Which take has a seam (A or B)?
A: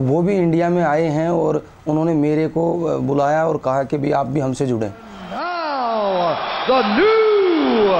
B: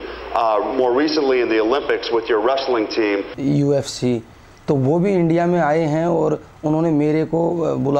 B